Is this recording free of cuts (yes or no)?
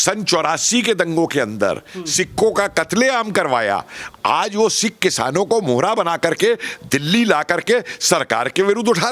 yes